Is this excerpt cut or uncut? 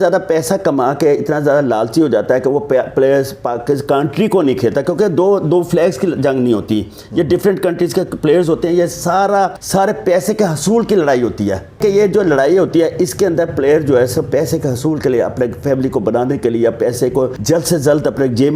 cut